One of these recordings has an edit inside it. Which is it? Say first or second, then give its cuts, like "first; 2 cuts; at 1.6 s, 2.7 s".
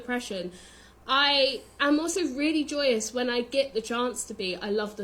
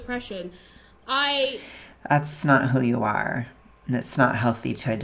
first; 1 cut; at 1.7 s